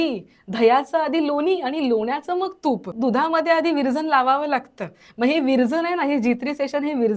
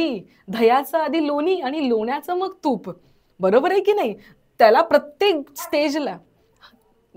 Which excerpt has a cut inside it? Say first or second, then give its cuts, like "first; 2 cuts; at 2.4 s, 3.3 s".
first; 1 cut; at 2.9 s